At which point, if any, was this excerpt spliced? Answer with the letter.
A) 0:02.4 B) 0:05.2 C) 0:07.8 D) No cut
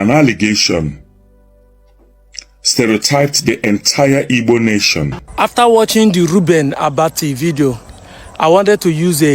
B